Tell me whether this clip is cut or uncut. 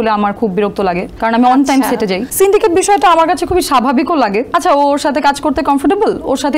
cut